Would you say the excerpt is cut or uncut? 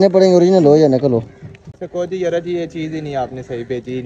cut